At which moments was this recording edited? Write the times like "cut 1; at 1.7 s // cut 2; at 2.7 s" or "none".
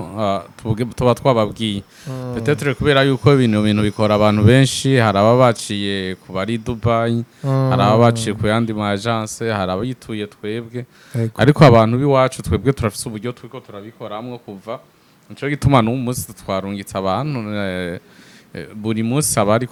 none